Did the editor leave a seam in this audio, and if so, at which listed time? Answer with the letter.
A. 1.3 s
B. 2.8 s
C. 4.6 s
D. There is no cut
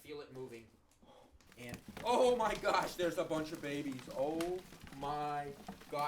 A